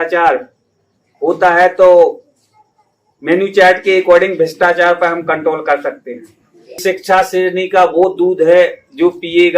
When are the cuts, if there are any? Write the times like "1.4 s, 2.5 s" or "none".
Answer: 6.8 s